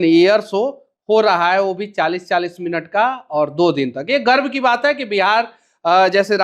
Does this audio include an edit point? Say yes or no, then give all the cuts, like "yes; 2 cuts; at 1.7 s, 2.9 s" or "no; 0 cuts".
no; 0 cuts